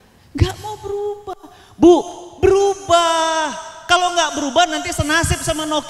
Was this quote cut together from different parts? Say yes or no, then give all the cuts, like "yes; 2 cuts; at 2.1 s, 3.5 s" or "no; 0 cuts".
no; 0 cuts